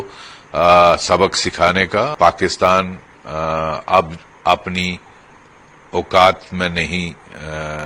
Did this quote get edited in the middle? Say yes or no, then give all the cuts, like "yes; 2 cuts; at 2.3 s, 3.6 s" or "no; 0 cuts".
yes; 1 cut; at 2.1 s